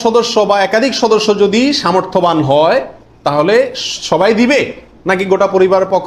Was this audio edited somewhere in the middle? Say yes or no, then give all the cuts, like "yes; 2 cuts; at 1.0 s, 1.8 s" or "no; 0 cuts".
no; 0 cuts